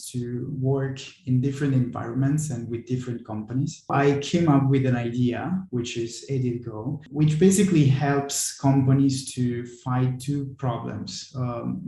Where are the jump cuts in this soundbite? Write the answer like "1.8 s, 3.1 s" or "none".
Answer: 3.9 s, 7.0 s